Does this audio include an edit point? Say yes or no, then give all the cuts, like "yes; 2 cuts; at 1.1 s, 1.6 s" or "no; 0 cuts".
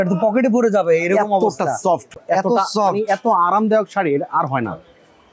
no; 0 cuts